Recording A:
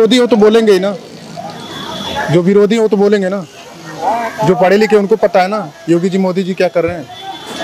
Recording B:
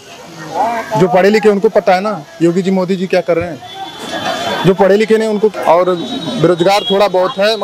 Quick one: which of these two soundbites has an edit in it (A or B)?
B